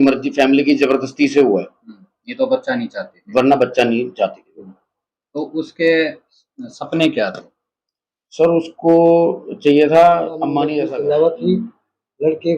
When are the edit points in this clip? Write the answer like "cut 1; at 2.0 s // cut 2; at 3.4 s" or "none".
cut 1; at 10.7 s